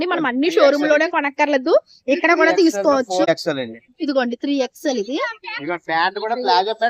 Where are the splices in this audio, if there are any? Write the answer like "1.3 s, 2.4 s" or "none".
3.3 s

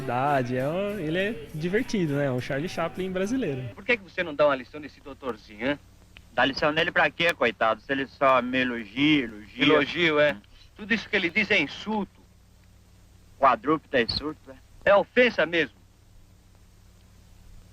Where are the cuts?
3.8 s

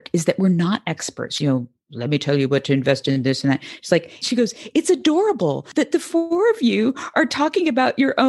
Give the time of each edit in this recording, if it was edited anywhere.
1.3 s, 4.2 s, 5.6 s

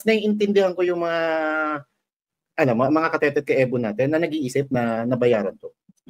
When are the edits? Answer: none

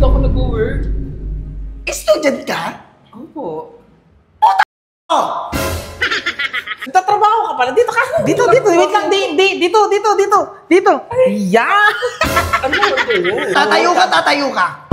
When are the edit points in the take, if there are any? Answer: 6.7 s, 13.5 s

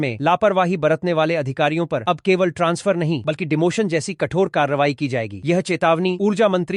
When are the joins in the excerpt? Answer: none

